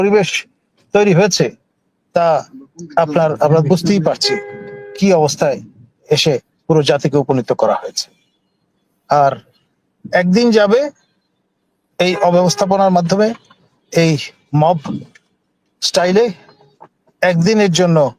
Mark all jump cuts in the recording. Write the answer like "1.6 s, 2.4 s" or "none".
none